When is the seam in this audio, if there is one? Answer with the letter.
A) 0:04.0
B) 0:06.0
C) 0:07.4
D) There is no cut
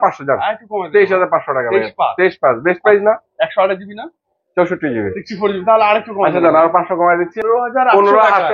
C